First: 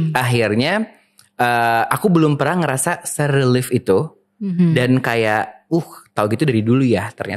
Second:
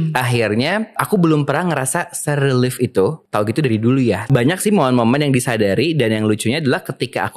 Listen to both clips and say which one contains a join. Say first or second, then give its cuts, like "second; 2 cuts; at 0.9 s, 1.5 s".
second; 3 cuts; at 1.0 s, 3.2 s, 4.3 s